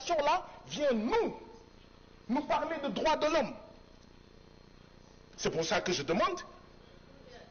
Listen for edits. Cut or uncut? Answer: uncut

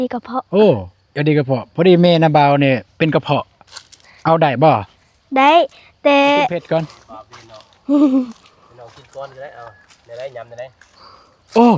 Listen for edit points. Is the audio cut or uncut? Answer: cut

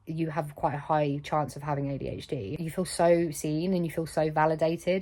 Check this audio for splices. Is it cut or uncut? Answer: cut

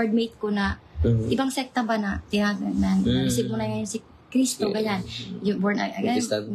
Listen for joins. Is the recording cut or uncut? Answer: uncut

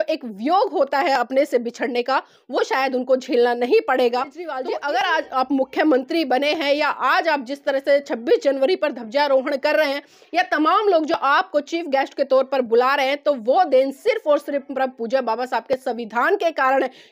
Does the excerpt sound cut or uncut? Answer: cut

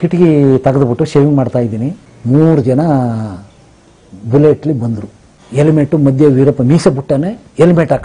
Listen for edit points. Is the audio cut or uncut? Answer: uncut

